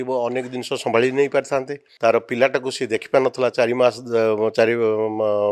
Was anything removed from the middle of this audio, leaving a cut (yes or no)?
yes